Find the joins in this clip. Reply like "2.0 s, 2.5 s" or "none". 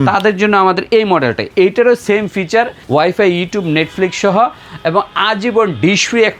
1.4 s, 2.8 s